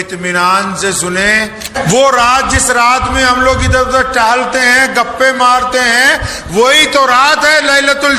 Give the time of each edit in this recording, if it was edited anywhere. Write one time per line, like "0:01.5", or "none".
0:01.7